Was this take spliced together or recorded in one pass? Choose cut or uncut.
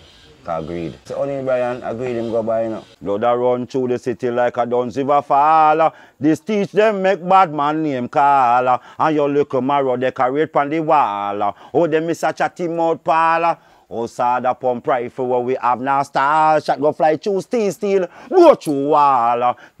cut